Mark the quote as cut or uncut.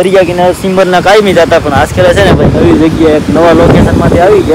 uncut